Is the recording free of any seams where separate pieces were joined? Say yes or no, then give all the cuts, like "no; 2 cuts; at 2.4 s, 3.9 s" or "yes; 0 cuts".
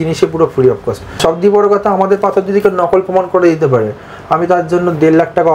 no; 1 cut; at 1.2 s